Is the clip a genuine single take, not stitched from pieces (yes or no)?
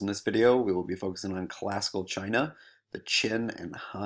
yes